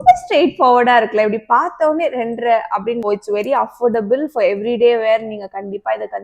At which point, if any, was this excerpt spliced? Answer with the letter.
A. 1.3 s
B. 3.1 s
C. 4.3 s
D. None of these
B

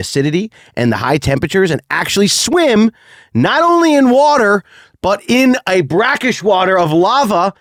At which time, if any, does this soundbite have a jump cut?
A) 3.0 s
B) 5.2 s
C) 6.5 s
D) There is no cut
D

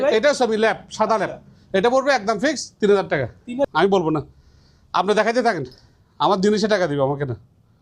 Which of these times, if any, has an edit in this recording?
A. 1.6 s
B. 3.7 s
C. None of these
B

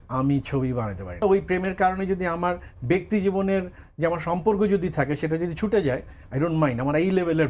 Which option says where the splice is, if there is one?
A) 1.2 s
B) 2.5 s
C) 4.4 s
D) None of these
A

